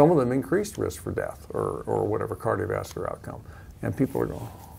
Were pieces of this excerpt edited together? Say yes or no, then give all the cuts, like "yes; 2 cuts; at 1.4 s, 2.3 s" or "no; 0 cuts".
no; 0 cuts